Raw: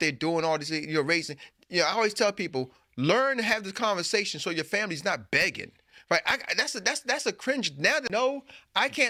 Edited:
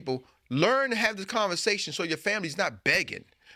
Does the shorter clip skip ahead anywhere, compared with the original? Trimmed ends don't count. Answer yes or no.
no